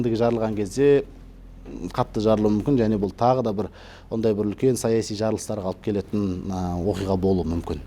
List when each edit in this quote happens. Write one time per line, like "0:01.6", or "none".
none